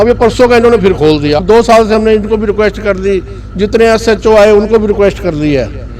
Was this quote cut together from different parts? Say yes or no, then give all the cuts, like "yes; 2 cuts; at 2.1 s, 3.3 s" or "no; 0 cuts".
yes; 1 cut; at 1.4 s